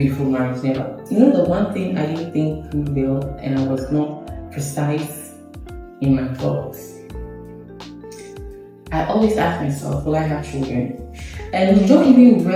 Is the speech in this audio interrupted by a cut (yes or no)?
no